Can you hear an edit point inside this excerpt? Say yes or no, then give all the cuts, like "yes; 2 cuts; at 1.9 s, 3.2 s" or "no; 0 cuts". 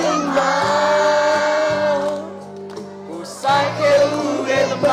no; 0 cuts